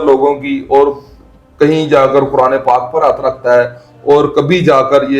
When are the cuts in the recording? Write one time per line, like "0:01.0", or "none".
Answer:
none